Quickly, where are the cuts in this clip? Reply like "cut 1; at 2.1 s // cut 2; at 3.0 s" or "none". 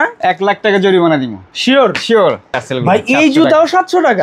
cut 1; at 2.6 s